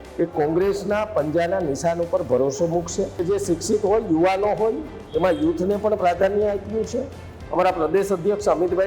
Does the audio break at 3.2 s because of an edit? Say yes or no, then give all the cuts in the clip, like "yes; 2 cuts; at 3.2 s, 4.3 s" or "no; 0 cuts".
yes; 1 cut; at 3.2 s